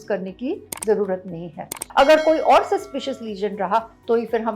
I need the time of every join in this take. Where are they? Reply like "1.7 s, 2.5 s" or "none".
1.8 s